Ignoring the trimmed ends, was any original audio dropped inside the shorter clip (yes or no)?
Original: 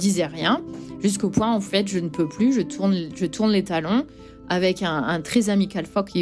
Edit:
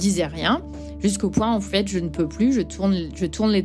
no